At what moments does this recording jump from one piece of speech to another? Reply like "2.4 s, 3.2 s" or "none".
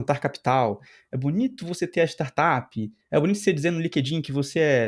none

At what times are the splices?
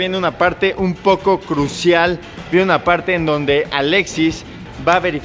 2.4 s

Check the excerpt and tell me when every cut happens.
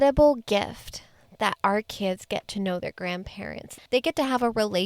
3.8 s

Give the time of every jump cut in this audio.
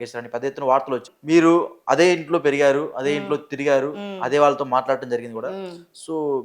1.1 s

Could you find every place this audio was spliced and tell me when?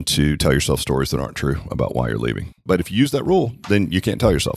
2.6 s

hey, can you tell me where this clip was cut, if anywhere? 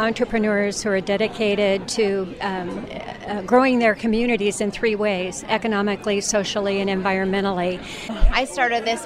8.1 s

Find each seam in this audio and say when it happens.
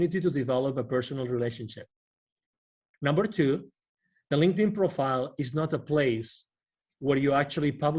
2.8 s

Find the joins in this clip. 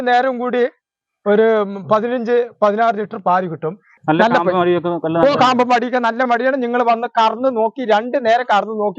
3.9 s

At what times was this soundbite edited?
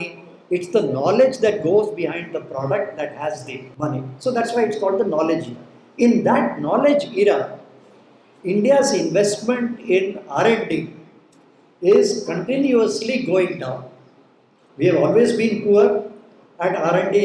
3.6 s

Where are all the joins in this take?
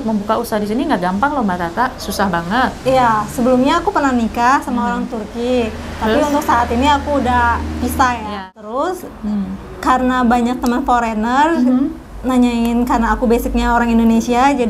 8.3 s

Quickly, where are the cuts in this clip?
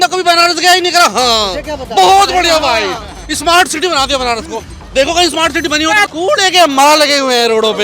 6.1 s

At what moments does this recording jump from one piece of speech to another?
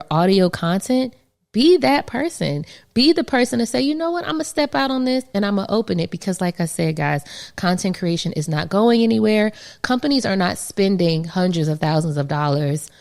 none

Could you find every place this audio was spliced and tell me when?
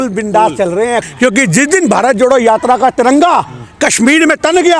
1.0 s

